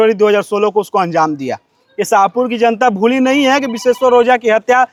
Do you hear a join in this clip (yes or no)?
no